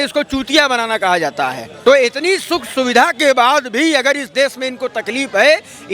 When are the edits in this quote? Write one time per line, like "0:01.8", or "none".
0:01.7